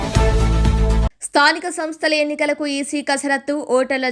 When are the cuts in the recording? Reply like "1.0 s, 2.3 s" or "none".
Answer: 1.1 s